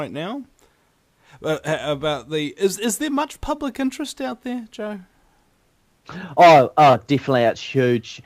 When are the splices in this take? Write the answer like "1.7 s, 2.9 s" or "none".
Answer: 6.0 s